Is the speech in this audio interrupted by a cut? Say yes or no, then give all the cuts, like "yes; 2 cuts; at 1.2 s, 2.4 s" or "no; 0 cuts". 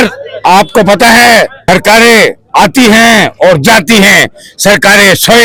no; 0 cuts